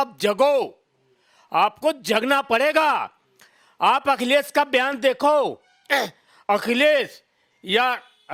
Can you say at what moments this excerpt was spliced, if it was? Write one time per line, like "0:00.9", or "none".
none